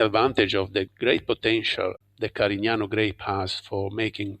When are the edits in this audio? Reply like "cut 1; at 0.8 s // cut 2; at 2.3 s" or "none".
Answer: cut 1; at 0.9 s